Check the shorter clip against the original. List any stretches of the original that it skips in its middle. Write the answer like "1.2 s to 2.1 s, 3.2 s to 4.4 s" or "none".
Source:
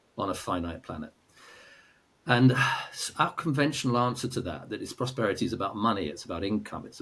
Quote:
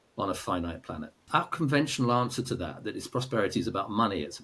1.1 s to 3.0 s